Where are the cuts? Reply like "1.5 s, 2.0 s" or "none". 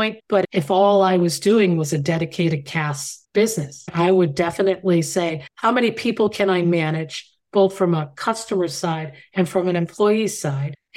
3.9 s, 5.5 s